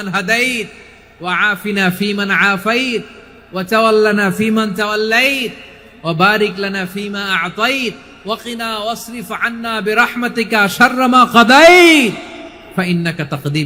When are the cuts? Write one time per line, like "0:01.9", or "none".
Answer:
none